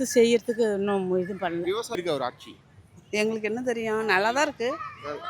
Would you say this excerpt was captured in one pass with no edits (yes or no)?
no